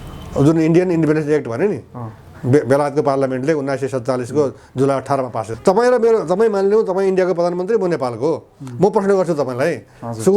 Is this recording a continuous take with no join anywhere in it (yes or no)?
no